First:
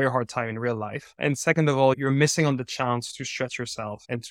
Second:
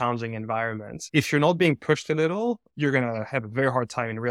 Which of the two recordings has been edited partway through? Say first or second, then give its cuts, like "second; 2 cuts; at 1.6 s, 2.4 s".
second; 2 cuts; at 1.0 s, 2.7 s